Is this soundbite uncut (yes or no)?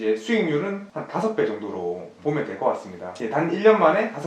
no